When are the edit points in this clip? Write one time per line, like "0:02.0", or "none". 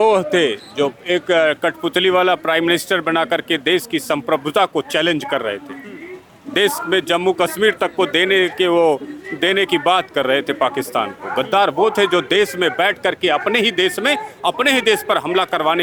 none